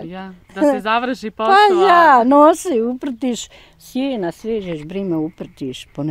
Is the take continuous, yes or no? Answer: yes